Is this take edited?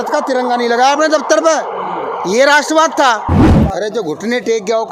yes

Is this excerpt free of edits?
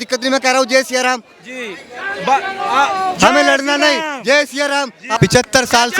no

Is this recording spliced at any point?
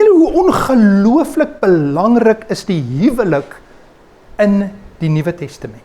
no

